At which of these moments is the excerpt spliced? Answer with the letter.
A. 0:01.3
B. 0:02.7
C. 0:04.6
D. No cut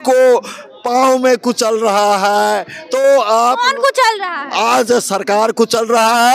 D